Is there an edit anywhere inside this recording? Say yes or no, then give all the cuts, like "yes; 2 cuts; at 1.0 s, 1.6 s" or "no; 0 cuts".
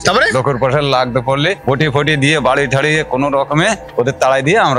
yes; 2 cuts; at 1.6 s, 3.8 s